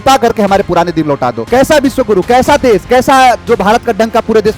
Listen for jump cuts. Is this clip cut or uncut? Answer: cut